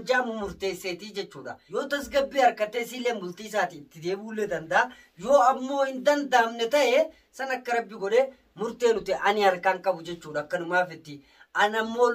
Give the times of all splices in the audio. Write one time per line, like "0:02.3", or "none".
0:01.6